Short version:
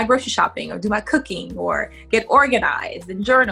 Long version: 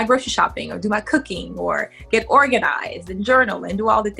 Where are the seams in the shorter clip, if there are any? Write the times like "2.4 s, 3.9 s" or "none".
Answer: none